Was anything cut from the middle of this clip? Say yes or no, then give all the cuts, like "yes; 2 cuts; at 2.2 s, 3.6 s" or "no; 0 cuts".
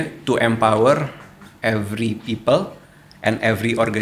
no; 0 cuts